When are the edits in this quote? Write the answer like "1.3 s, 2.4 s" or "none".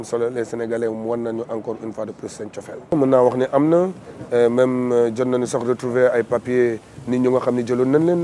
5.6 s